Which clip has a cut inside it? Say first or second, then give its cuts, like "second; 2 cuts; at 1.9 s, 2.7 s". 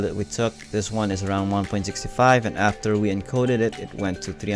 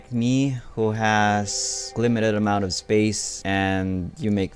second; 1 cut; at 1.9 s